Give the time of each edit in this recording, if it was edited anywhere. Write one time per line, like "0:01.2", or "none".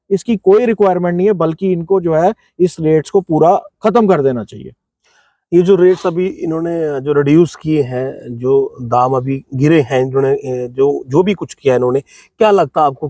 none